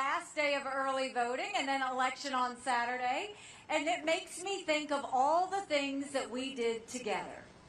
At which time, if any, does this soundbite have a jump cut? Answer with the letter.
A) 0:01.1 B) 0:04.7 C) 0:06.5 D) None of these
B